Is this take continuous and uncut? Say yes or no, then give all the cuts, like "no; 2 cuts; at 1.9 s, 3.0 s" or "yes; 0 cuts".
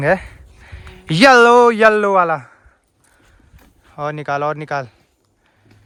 yes; 0 cuts